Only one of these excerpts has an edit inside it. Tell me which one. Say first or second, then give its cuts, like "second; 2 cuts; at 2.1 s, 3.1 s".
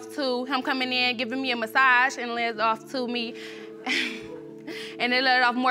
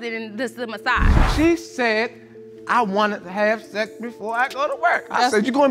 second; 1 cut; at 1.2 s